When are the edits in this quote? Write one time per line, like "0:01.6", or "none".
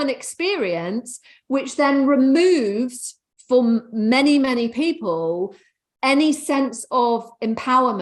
none